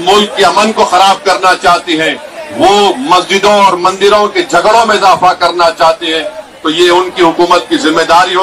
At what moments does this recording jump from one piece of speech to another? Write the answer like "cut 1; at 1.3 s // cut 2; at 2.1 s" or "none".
none